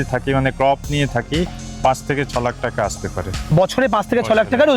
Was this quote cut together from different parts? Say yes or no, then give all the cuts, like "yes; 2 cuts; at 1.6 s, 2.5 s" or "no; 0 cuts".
yes; 1 cut; at 3.5 s